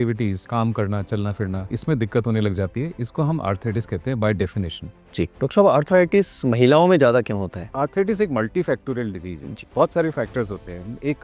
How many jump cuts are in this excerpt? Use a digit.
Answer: 2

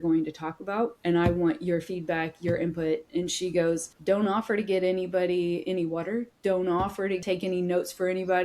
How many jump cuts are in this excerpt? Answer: 3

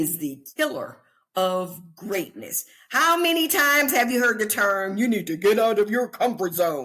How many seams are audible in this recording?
0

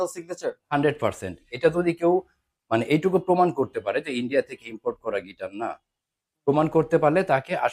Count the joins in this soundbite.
1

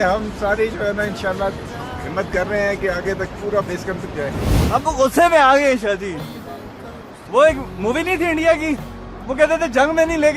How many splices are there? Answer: 1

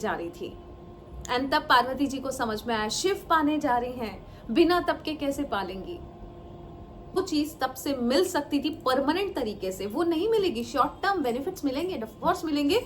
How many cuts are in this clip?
1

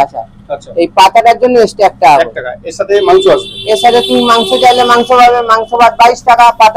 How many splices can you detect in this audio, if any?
0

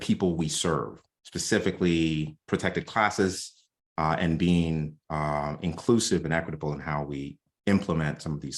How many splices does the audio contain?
1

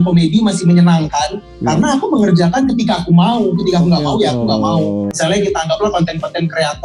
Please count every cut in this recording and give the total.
1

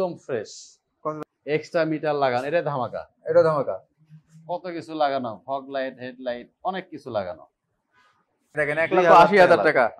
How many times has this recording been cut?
2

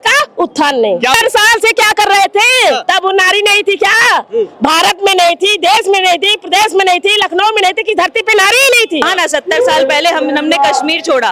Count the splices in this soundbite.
2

